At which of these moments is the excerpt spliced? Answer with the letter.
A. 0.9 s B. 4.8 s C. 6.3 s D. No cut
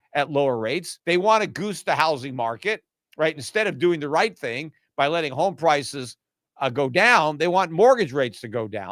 A